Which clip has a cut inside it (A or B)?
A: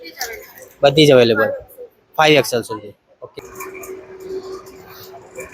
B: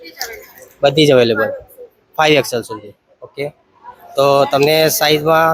A